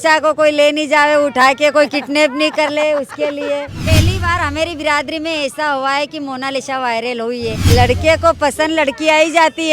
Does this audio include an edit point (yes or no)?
yes